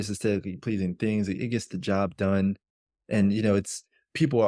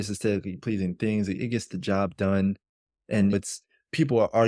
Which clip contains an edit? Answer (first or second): second